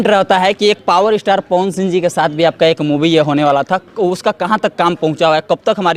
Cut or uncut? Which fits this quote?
uncut